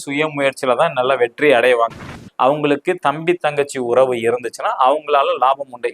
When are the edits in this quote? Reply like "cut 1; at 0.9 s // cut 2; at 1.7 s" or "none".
cut 1; at 2.2 s